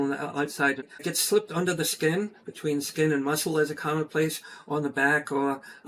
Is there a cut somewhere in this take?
yes; 1 cut; at 1.1 s

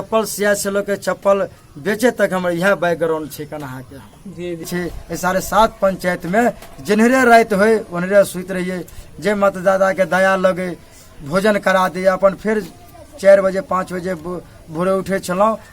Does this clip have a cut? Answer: yes; 1 cut; at 4.6 s

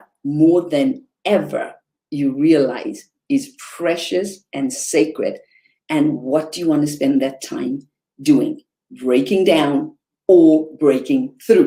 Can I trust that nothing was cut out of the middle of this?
yes; 0 cuts

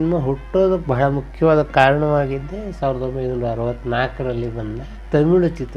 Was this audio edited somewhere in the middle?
no; 0 cuts

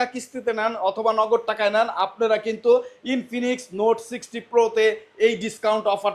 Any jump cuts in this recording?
no; 0 cuts

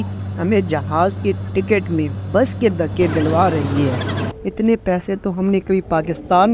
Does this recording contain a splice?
yes; 1 cut; at 4.3 s

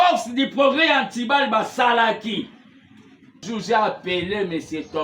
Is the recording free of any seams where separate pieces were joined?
no; 1 cut; at 3.4 s

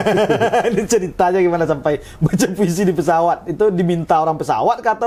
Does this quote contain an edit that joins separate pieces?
no; 0 cuts

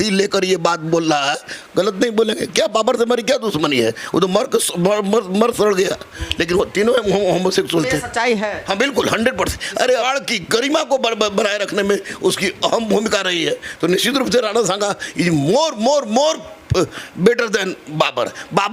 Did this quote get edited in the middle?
yes; 1 cut; at 10.1 s

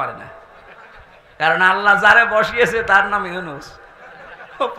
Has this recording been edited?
no; 0 cuts

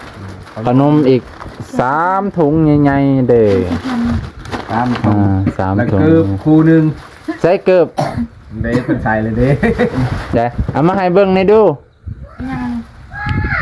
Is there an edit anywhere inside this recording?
no; 0 cuts

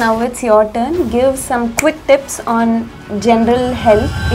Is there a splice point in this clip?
no; 0 cuts

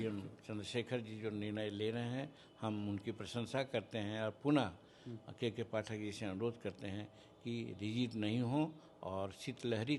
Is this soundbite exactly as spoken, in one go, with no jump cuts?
yes; 0 cuts

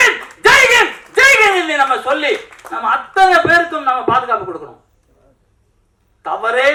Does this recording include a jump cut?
no; 0 cuts

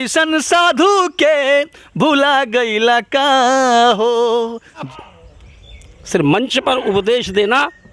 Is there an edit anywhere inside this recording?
yes; 1 cut; at 4.9 s

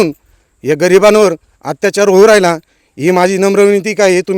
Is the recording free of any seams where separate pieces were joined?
yes; 0 cuts

